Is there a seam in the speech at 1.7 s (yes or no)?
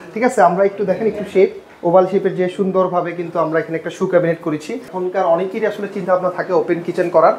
no